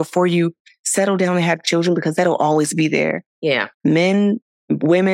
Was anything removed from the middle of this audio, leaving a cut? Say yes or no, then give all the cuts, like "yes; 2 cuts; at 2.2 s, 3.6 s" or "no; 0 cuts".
no; 0 cuts